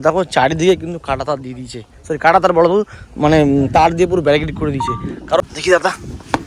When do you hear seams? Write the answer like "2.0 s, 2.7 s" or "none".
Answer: 5.5 s